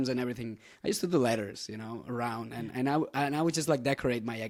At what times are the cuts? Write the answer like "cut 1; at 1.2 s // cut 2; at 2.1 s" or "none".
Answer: none

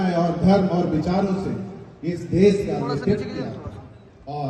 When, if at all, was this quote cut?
none

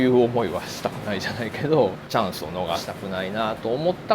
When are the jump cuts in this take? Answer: cut 1; at 2.0 s // cut 2; at 2.9 s

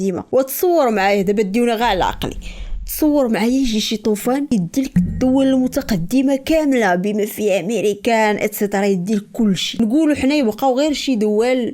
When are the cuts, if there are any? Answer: cut 1; at 4.5 s

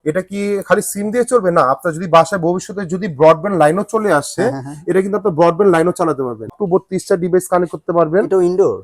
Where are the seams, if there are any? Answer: cut 1; at 6.5 s

